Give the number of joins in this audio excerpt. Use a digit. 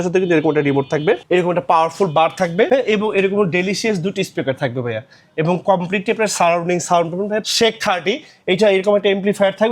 3